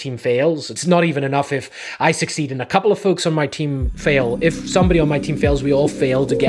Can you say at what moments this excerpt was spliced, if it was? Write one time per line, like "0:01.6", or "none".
none